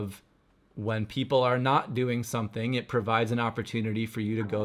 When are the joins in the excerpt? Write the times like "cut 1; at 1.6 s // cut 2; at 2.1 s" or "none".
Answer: none